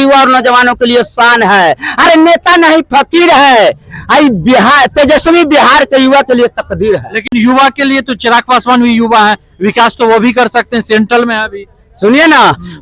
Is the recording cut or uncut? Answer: uncut